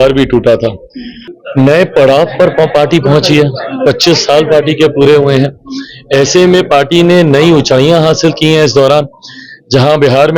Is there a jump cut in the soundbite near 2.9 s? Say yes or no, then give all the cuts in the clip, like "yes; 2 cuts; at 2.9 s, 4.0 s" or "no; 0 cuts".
no; 1 cut; at 1.4 s